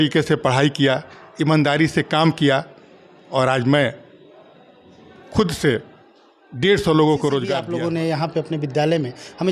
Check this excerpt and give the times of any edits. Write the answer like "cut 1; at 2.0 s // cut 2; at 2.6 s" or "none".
cut 1; at 7.6 s